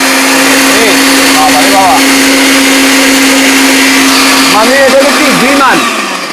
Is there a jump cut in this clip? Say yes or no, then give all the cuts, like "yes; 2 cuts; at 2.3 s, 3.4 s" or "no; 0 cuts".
no; 0 cuts